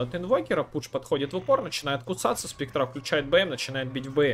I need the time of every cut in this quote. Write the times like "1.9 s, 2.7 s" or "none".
none